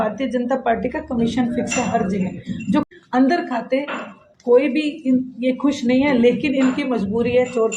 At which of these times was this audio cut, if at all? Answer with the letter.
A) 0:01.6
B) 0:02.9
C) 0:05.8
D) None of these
B